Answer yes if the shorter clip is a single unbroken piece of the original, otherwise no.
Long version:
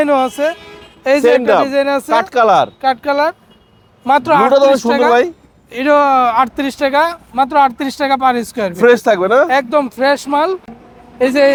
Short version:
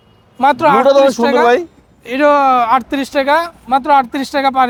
yes